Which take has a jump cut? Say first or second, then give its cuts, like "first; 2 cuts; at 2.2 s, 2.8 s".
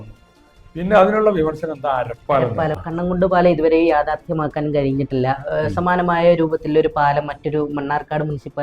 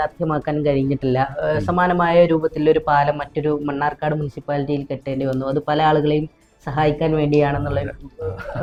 first; 1 cut; at 2.8 s